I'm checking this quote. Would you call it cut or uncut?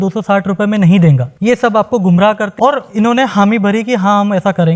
cut